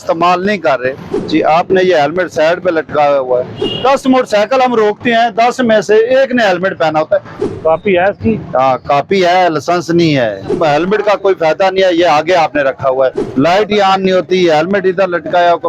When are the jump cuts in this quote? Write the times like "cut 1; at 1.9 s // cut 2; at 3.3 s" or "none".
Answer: cut 1; at 1.1 s // cut 2; at 3.6 s // cut 3; at 7.4 s // cut 4; at 10.5 s // cut 5; at 13.2 s